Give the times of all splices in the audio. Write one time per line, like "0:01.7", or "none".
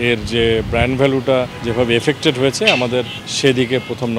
0:01.6
0:03.2